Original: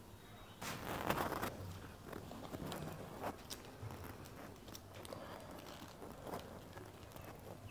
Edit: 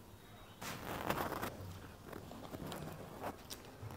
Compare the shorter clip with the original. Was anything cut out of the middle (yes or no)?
no